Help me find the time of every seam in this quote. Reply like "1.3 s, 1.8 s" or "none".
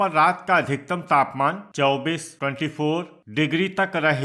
1.7 s, 3.2 s